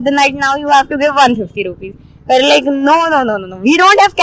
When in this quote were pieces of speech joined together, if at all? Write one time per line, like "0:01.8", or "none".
none